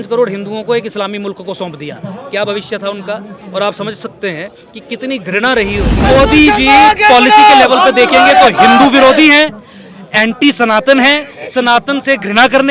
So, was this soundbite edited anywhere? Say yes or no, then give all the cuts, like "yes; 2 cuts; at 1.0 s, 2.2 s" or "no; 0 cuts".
yes; 1 cut; at 6.1 s